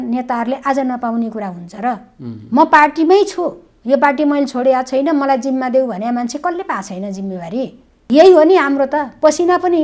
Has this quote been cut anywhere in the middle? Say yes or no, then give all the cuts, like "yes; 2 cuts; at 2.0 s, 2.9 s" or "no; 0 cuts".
yes; 1 cut; at 7.9 s